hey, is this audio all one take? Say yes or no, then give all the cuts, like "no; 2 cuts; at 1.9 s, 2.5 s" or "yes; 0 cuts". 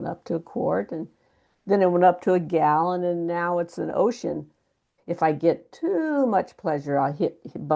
no; 1 cut; at 4.9 s